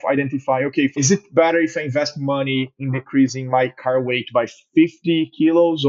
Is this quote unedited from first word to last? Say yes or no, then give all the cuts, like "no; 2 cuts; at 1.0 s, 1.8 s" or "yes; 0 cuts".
no; 1 cut; at 1.0 s